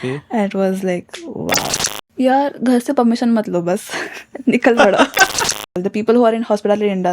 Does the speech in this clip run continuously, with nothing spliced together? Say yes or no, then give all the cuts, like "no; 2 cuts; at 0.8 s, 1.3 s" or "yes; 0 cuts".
no; 2 cuts; at 1.8 s, 5.7 s